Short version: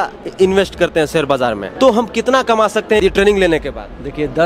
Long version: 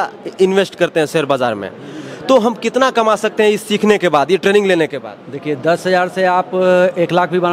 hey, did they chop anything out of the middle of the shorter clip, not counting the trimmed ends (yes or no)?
yes